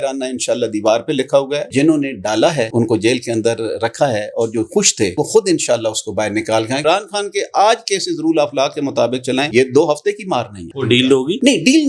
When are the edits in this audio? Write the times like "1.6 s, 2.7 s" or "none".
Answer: 1.7 s, 2.7 s, 5.2 s, 6.8 s, 9.5 s, 10.7 s